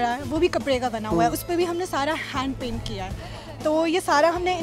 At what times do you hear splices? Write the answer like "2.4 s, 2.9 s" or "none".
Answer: none